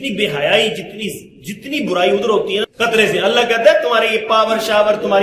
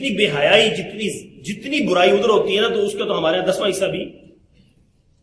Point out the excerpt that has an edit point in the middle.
first; 1 cut; at 2.7 s

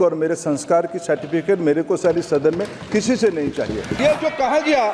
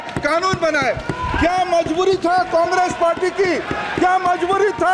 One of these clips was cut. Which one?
first; 1 cut; at 3.9 s

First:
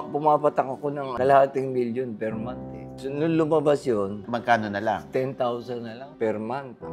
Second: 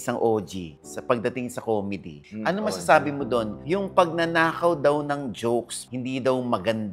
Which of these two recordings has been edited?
first; 4 cuts; at 1.1 s, 2.9 s, 4.2 s, 6.0 s

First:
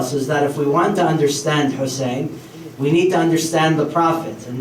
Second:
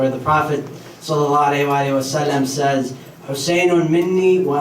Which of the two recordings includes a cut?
second; 1 cut; at 3.2 s

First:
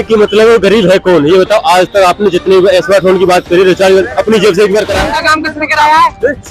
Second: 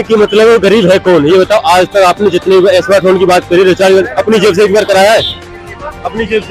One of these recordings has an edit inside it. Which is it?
first; 1 cut; at 5.0 s

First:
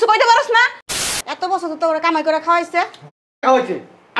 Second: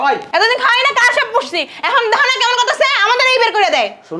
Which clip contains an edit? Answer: first; 1 cut; at 1.0 s

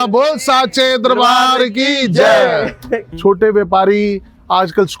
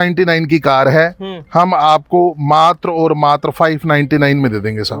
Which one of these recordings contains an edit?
first; 1 cut; at 3.1 s

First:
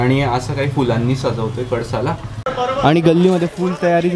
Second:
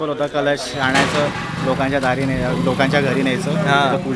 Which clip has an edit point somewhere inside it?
first; 1 cut; at 2.3 s

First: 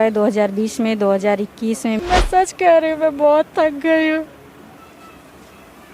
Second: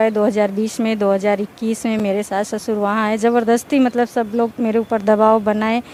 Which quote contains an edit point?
first; 1 cut; at 2.0 s

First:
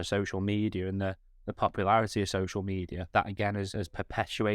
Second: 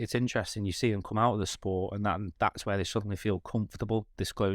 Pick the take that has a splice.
first; 1 cut; at 3.0 s

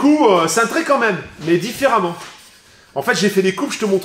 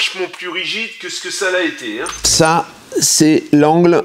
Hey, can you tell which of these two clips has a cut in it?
second; 1 cut; at 2.2 s

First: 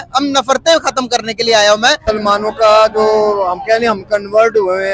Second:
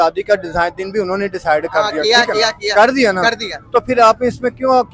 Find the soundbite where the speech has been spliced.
first; 1 cut; at 2.0 s

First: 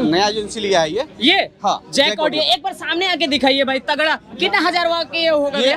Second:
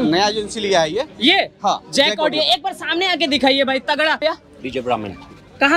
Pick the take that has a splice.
second; 1 cut; at 4.2 s

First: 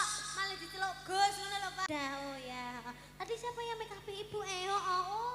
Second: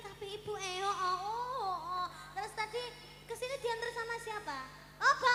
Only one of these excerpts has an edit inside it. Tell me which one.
first; 1 cut; at 1.8 s

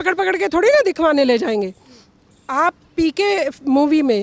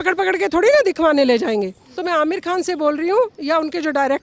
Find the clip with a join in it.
second; 1 cut; at 1.8 s

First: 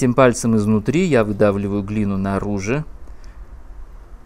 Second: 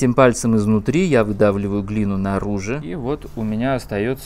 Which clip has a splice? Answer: second; 1 cut; at 2.8 s

